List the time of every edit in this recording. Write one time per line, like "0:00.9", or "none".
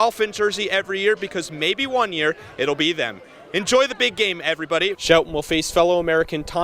0:05.0